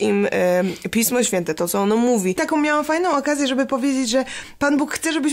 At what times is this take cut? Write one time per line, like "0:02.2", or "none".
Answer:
0:02.4